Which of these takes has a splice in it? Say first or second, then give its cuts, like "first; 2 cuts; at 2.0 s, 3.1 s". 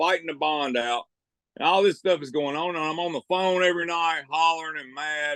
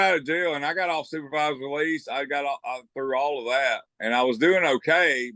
second; 1 cut; at 3.9 s